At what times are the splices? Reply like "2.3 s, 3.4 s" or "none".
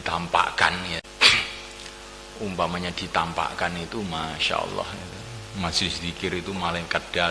1.0 s

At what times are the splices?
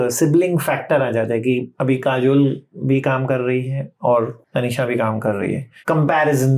1.7 s, 4.4 s, 5.7 s

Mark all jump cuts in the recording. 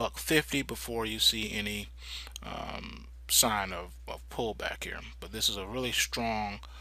2.5 s

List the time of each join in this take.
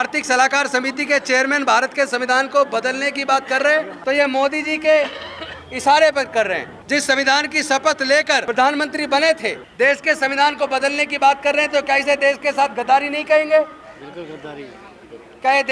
3.9 s, 6.7 s, 8.4 s, 9.6 s

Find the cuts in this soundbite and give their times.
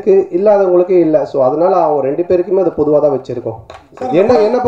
none

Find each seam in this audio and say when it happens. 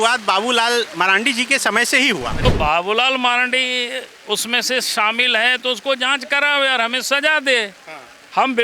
2.4 s

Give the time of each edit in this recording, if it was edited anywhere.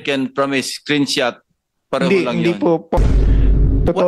3.0 s

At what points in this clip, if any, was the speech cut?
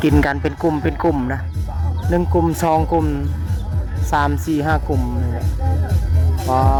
none

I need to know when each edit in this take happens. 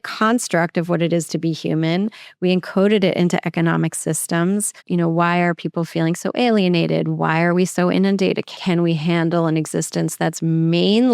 4.8 s, 8.6 s

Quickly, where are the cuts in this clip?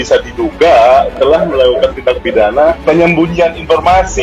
2.8 s

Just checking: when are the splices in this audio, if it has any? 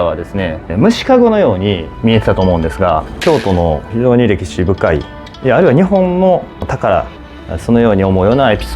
1.9 s, 3.1 s, 6.6 s

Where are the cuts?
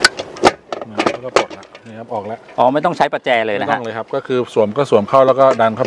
none

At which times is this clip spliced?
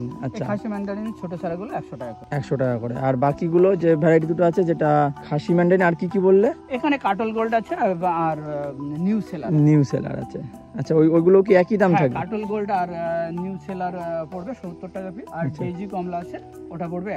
none

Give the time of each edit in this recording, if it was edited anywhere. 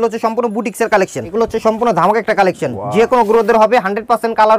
1.3 s

